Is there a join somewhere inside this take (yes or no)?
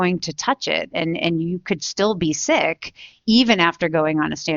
no